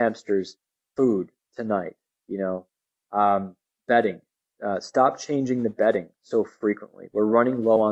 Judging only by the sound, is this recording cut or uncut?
uncut